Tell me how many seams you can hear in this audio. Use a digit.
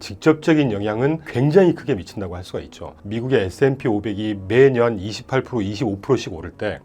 1